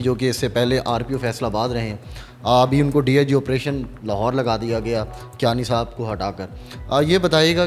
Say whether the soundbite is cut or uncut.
uncut